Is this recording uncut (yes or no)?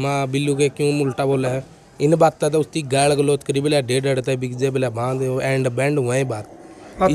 yes